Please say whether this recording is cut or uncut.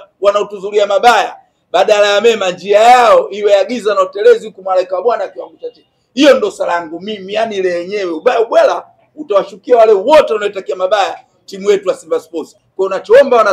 cut